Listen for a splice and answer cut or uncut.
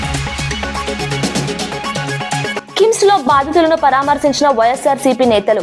cut